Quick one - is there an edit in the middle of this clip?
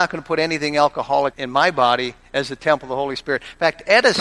yes; 1 cut; at 1.4 s

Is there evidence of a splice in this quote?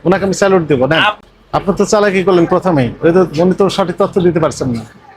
yes; 1 cut; at 1.2 s

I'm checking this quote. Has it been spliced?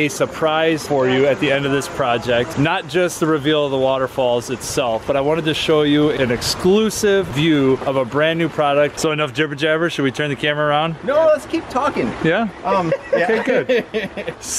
yes; 1 cut; at 9.0 s

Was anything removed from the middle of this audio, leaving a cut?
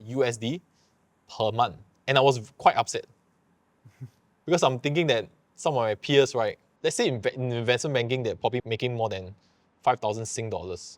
no; 0 cuts

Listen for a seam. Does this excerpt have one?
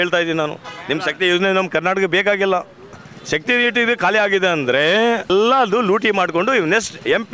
yes; 2 cuts; at 3.1 s, 5.3 s

